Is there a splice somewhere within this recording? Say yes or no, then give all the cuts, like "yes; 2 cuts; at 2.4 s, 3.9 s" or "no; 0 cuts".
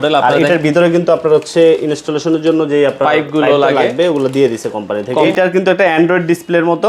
yes; 1 cut; at 5.1 s